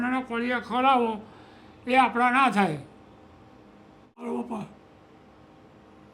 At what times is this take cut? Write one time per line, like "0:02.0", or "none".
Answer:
0:04.2